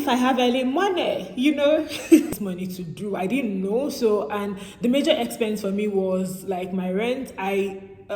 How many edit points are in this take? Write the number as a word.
one